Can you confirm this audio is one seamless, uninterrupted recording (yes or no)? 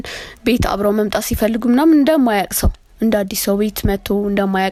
yes